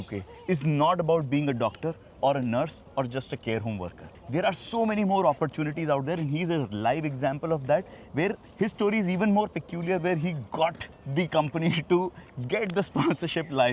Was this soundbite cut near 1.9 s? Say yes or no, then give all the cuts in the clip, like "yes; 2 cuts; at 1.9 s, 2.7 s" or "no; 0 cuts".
no; 0 cuts